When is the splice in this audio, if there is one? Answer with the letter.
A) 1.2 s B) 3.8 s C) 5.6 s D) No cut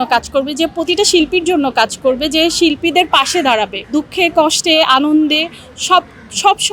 B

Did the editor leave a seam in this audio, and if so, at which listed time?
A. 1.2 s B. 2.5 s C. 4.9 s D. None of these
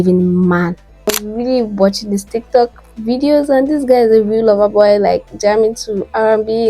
A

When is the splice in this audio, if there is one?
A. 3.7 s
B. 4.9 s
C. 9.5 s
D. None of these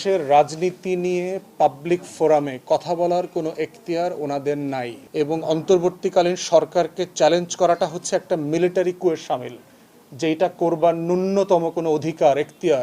B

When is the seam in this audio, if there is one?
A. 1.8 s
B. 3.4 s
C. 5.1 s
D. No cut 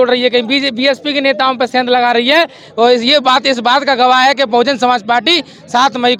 D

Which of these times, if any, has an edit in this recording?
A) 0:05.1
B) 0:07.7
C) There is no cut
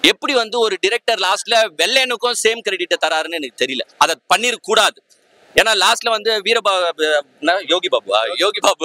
C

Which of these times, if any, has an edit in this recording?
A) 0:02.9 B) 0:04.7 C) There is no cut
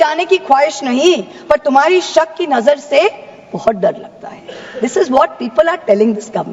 C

